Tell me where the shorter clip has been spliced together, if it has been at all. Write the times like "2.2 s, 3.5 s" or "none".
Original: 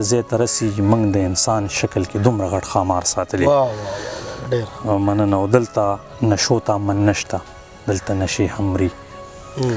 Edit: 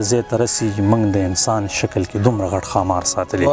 none